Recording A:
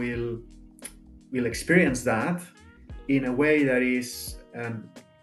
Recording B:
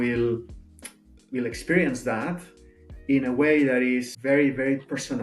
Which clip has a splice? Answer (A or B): B